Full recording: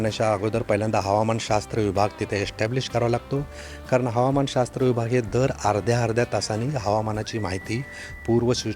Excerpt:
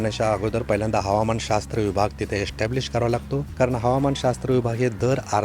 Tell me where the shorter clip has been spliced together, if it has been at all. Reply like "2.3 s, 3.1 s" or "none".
3.5 s